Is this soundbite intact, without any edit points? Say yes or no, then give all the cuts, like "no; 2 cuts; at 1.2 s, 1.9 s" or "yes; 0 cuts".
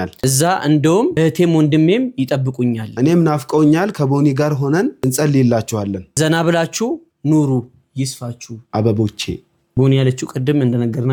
yes; 0 cuts